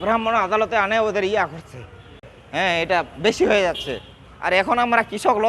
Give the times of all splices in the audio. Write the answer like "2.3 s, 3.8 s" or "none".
2.4 s